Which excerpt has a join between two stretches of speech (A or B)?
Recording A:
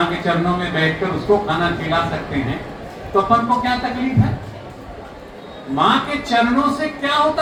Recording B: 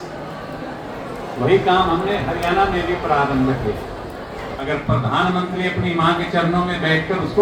B